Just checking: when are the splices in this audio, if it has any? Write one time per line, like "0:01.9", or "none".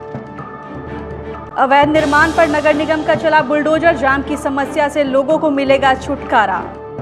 none